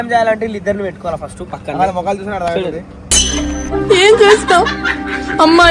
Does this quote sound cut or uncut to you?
cut